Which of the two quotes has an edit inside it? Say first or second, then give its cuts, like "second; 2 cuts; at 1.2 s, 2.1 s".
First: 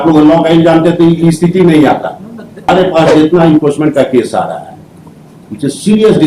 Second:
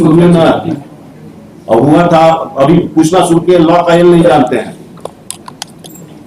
first; 1 cut; at 2.7 s